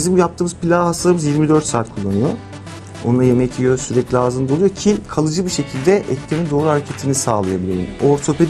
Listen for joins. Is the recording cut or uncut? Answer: uncut